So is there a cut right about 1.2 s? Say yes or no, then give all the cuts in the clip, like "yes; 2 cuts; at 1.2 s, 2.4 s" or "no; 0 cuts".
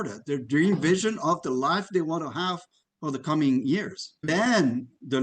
no; 1 cut; at 4.2 s